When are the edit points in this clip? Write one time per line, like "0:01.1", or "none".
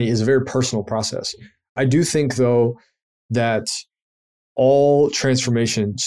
0:01.7